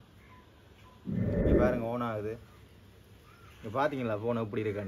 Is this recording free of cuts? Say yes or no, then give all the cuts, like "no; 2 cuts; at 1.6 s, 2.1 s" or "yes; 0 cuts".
no; 2 cuts; at 1.1 s, 1.6 s